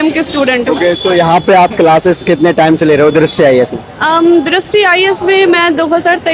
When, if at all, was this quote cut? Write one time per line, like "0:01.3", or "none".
none